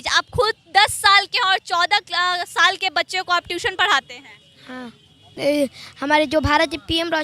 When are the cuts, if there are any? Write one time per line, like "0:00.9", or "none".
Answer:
0:05.3

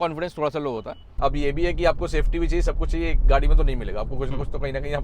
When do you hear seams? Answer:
0:01.0

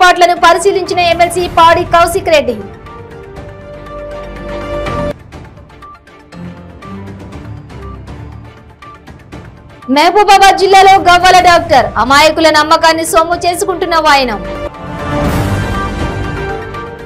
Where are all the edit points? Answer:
none

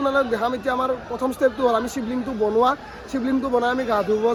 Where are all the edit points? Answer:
none

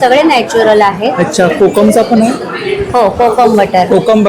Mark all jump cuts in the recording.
none

